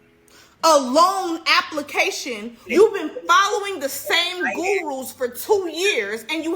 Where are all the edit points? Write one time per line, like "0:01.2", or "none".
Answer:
0:02.5